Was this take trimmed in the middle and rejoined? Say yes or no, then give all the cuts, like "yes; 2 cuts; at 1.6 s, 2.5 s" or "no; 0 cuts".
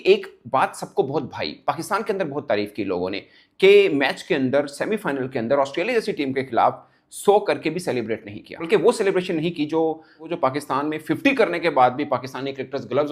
yes; 2 cuts; at 8.6 s, 10.3 s